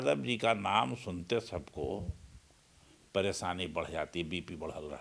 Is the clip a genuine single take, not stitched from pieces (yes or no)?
yes